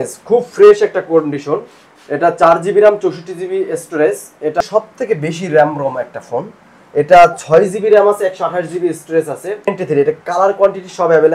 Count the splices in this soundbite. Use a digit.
2